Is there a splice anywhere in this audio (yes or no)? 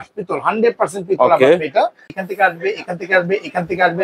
yes